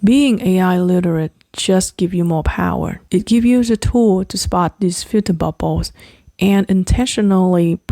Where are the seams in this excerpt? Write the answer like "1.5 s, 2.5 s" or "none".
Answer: 3.0 s